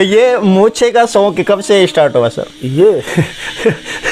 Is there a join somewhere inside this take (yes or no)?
no